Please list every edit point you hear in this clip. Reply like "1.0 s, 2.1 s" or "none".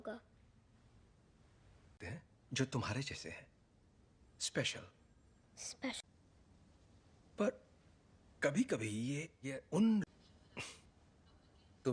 none